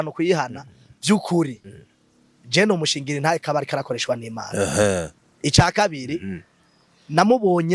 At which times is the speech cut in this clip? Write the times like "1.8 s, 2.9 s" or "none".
none